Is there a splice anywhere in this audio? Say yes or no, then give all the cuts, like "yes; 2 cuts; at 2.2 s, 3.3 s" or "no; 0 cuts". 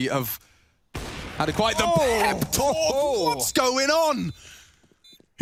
no; 0 cuts